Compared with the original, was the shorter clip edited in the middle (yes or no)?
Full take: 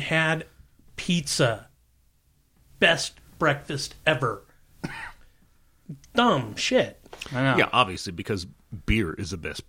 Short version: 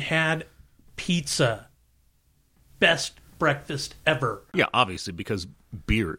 yes